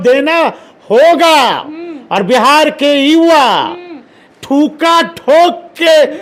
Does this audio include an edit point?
no; 0 cuts

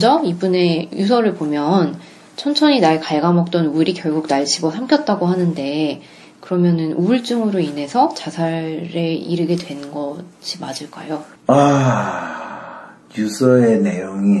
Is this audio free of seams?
yes; 0 cuts

